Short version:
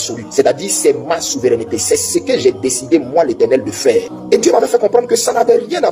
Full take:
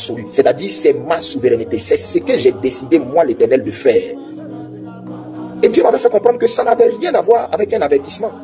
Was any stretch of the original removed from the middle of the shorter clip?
yes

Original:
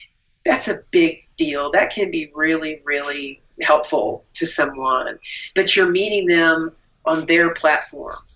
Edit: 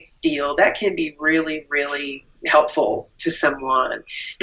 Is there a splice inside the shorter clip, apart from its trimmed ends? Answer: no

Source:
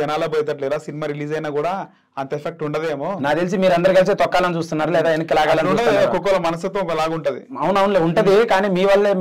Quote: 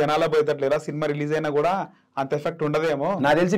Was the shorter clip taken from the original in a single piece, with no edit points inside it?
yes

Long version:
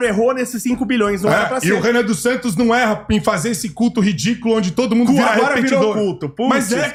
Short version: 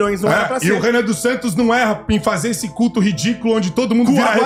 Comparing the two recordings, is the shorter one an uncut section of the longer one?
yes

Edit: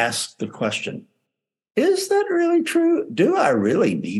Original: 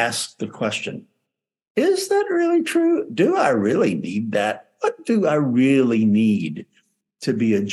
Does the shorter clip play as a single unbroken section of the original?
yes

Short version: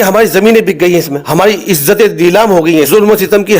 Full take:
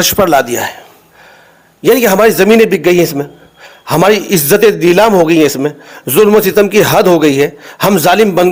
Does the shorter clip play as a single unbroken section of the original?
no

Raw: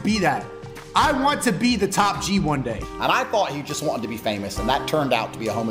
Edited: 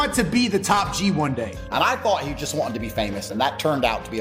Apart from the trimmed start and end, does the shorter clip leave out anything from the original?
no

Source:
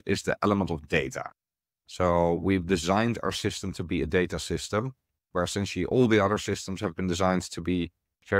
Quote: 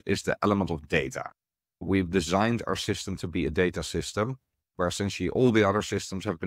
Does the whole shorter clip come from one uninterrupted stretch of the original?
no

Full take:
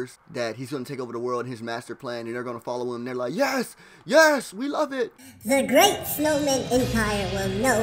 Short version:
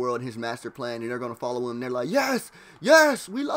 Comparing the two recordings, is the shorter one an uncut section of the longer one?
yes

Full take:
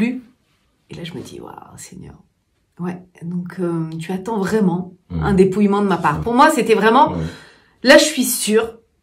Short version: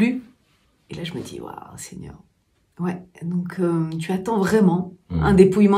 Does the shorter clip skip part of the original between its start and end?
no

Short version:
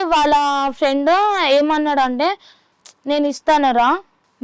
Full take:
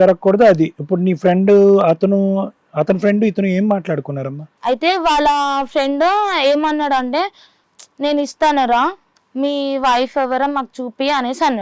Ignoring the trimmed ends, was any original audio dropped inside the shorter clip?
no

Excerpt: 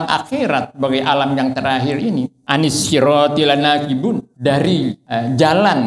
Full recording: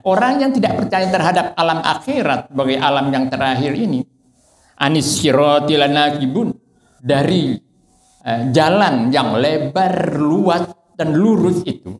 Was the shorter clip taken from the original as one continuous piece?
no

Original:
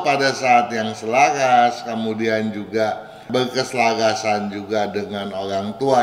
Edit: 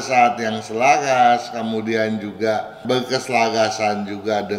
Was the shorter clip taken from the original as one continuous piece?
no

